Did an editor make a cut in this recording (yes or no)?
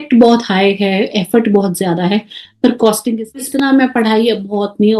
yes